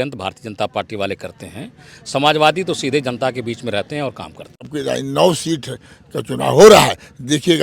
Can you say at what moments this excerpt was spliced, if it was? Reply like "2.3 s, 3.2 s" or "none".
4.7 s